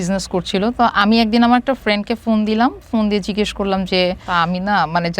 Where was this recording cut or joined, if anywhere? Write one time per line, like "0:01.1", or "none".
0:04.3